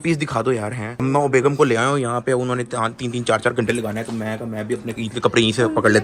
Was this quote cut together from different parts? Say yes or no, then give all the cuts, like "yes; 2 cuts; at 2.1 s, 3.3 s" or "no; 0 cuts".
no; 0 cuts